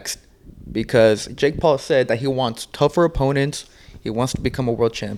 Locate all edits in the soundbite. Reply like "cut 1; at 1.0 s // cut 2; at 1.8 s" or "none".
none